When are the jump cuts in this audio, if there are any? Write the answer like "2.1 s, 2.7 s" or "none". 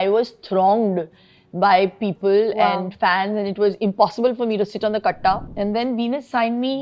5.4 s

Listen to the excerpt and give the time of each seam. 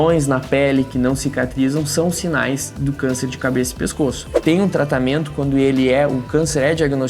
4.3 s

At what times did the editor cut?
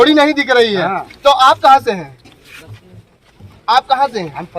none

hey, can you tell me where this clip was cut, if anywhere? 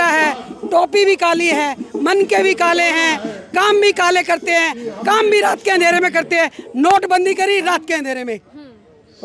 none

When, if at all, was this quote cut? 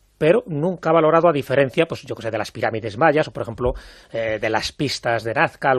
none

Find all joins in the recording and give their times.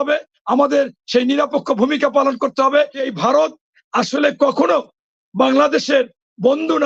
3.1 s

